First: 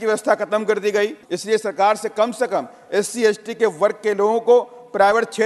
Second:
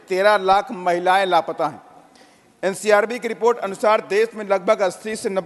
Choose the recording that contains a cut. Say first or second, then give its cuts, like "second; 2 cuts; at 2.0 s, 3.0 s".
first; 1 cut; at 1.3 s